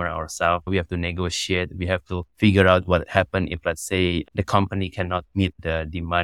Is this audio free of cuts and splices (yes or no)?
yes